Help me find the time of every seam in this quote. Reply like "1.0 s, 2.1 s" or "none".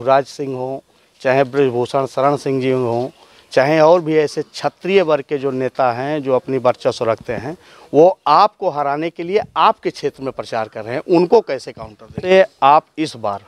12.2 s